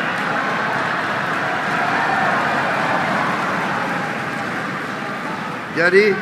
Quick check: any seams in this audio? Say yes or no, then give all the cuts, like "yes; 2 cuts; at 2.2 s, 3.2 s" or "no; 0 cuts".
no; 0 cuts